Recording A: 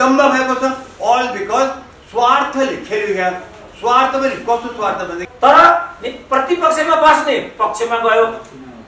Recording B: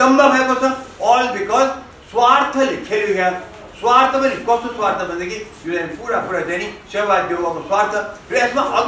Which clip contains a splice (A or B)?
A